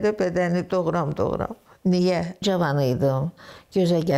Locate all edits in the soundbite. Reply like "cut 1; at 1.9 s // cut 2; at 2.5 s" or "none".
cut 1; at 2.4 s